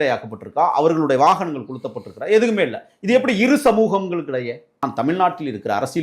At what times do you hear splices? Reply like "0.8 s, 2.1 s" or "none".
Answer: 4.8 s